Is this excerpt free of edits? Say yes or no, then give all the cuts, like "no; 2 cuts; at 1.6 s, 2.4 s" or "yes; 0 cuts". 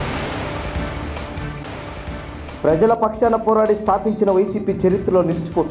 no; 1 cut; at 2.4 s